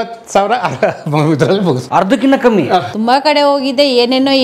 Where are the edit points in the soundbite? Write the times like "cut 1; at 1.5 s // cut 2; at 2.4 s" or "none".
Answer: cut 1; at 1.8 s // cut 2; at 2.9 s